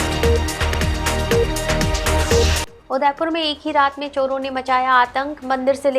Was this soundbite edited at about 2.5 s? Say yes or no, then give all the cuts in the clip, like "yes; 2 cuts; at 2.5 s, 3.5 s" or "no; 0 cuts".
yes; 1 cut; at 2.5 s